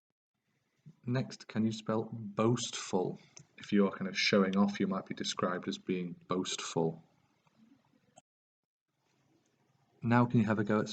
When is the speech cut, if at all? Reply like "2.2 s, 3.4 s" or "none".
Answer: none